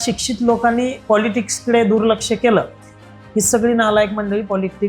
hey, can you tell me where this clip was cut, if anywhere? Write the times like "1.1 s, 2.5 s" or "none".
1.0 s